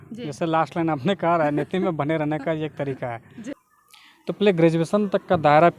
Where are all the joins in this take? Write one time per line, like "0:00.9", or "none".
0:03.5